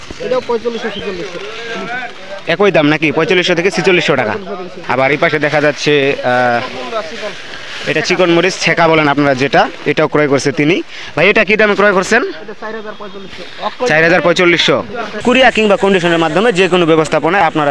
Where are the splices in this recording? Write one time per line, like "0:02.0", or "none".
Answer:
0:04.7
0:15.1